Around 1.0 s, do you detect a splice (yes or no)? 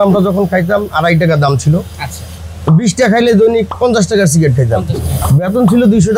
no